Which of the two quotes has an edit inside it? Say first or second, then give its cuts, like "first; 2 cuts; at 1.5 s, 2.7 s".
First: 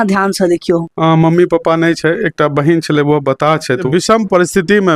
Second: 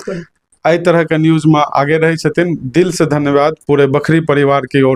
first; 2 cuts; at 0.9 s, 3.9 s